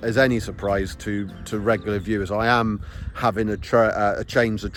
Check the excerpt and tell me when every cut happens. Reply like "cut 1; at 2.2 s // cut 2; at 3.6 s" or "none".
none